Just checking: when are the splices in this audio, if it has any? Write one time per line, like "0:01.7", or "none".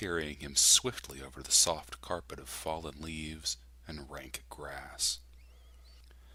none